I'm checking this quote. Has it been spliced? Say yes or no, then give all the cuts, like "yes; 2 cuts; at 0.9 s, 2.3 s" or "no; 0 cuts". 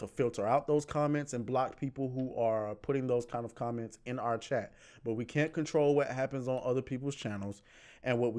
no; 0 cuts